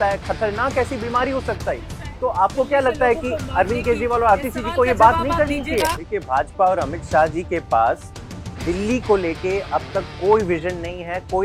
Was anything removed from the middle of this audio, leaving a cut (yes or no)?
no